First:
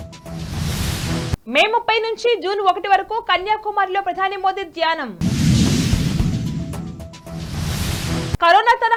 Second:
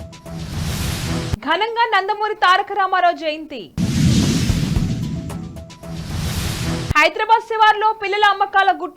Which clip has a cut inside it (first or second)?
second